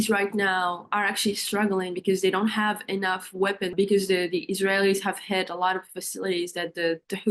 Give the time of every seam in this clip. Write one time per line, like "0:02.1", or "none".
0:03.7

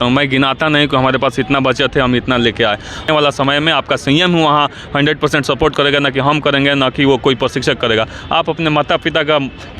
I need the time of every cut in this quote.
0:03.1

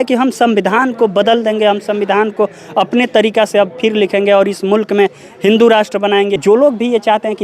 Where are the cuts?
0:06.4

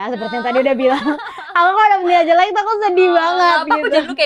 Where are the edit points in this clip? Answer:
none

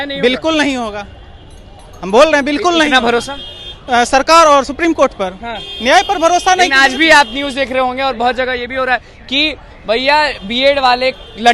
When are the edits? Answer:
none

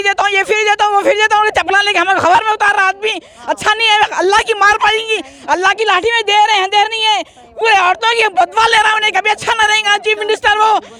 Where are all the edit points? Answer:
none

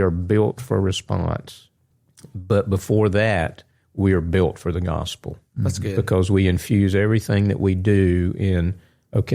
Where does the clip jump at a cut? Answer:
none

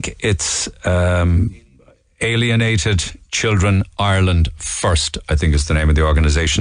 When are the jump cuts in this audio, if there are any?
none

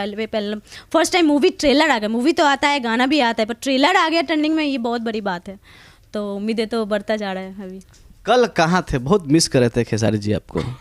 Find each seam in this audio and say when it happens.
none

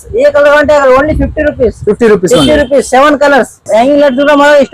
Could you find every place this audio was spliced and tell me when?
0:03.6

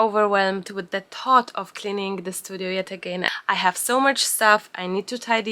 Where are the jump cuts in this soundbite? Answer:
0:03.3

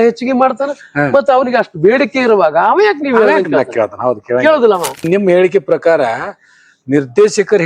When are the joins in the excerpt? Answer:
0:05.1

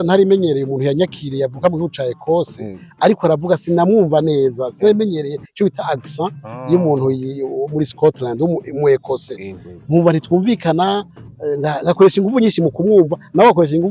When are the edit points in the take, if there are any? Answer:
none

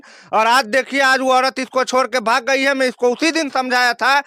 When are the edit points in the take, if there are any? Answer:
none

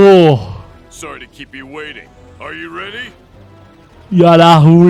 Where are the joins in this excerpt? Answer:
none

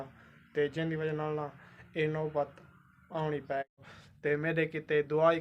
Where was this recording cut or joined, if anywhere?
0:03.7

